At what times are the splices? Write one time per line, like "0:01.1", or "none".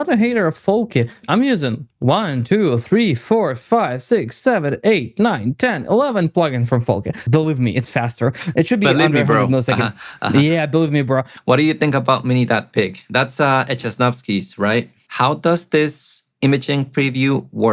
0:01.2
0:07.3
0:11.3
0:15.0